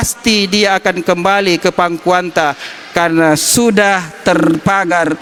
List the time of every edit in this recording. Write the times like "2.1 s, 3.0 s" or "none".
none